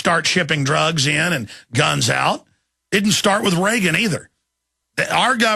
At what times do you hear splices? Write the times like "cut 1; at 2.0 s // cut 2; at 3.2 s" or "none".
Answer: cut 1; at 2.0 s